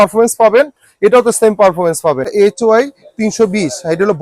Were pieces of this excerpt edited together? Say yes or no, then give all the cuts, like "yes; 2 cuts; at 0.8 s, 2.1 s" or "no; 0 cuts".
yes; 1 cut; at 2.3 s